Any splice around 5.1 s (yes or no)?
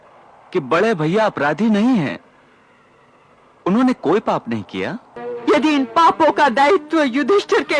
yes